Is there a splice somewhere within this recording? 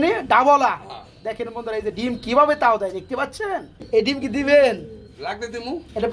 yes; 1 cut; at 3.8 s

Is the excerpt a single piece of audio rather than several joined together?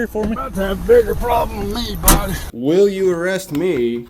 no; 1 cut; at 2.4 s

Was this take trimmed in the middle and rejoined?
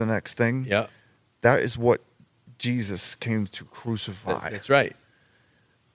no; 0 cuts

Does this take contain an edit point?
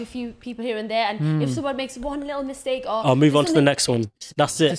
no; 0 cuts

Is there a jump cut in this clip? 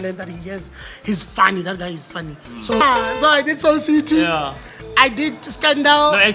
yes; 1 cut; at 2.8 s

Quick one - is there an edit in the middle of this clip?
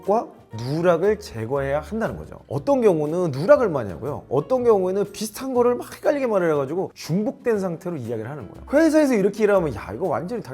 yes; 1 cut; at 8.6 s

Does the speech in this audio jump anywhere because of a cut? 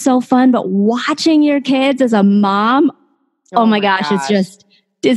no; 0 cuts

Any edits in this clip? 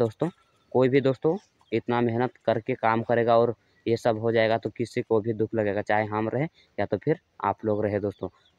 no; 0 cuts

